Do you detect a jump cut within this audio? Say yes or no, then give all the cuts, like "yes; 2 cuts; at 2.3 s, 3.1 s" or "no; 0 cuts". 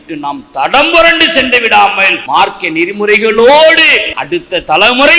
yes; 2 cuts; at 2.1 s, 4.1 s